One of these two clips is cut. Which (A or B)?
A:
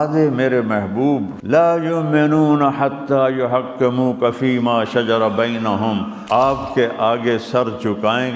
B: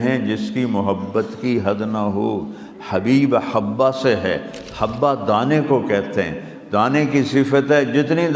A